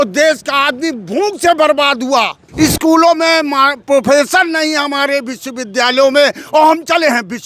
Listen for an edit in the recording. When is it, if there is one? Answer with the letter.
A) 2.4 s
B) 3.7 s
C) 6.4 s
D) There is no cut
A